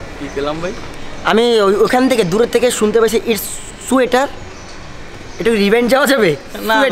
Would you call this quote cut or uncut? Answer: uncut